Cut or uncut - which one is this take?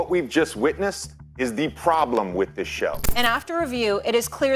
cut